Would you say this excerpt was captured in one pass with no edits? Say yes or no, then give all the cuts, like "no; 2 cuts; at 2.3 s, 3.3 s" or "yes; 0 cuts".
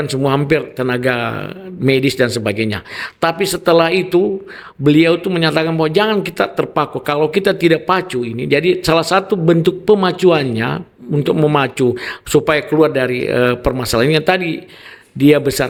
yes; 0 cuts